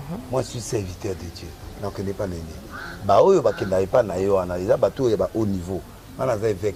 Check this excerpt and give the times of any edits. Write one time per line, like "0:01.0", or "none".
none